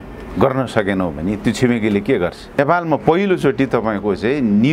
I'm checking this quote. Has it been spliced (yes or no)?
yes